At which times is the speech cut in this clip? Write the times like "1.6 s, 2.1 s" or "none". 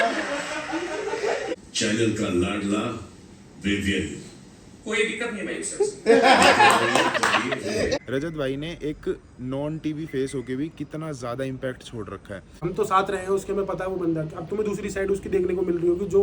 1.5 s, 8.0 s, 12.5 s